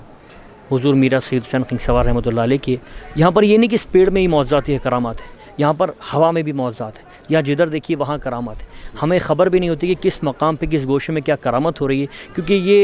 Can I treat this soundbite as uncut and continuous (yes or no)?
yes